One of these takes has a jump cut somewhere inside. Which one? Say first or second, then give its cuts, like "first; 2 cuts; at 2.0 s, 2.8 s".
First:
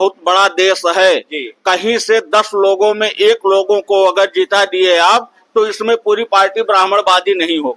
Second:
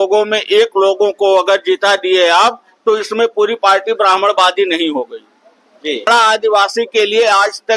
second; 1 cut; at 6.1 s